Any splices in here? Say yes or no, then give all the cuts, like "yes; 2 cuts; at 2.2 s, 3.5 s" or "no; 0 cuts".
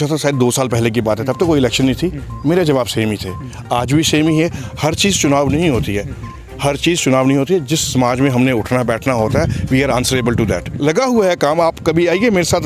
yes; 1 cut; at 11.0 s